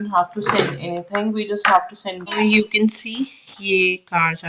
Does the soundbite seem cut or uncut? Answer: cut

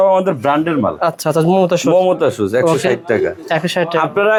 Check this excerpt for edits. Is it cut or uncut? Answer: uncut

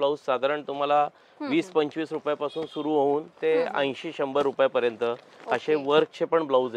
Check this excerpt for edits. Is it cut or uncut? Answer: uncut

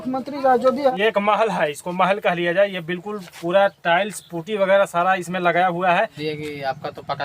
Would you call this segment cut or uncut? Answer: cut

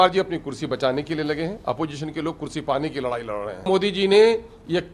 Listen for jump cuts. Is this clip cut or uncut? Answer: cut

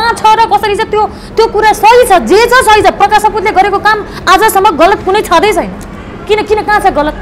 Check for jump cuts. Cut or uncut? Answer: uncut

